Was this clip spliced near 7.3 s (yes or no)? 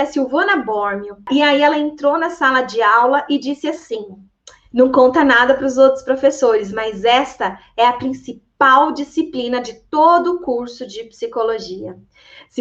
no